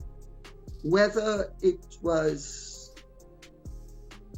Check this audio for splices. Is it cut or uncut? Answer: uncut